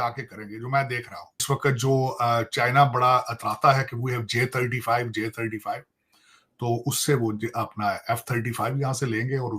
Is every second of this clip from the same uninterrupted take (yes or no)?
no